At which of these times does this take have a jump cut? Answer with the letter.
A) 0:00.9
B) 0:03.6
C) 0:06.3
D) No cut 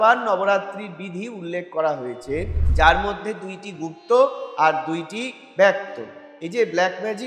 C